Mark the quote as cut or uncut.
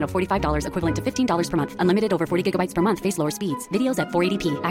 uncut